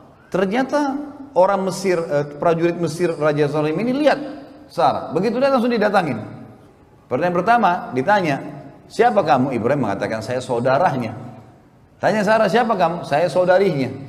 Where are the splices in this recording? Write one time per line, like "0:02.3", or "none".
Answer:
none

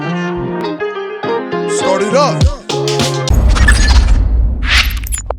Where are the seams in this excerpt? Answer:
0:03.3

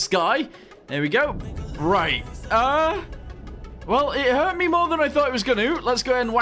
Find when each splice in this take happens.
0:01.4

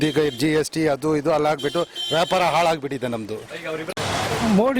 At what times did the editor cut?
0:03.9

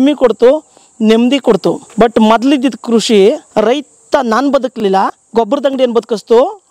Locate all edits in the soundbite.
0:01.8
0:03.4

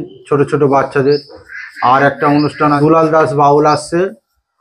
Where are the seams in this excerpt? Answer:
0:02.8

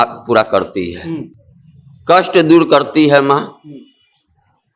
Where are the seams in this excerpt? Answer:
none

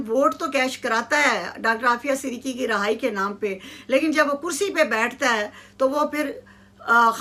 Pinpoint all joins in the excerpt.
none

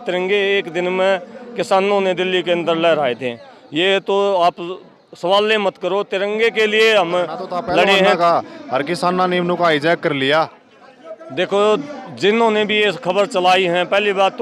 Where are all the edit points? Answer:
0:08.1

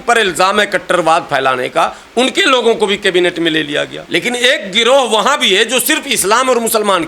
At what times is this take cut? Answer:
0:04.0

